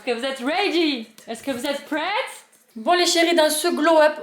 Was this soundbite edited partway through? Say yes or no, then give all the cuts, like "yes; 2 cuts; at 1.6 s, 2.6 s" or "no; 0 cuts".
yes; 1 cut; at 2.7 s